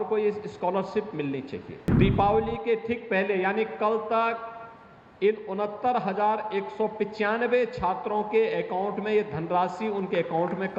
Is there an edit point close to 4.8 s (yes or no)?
no